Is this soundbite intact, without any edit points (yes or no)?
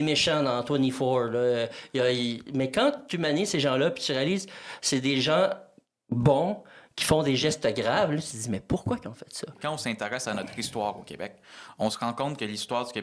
no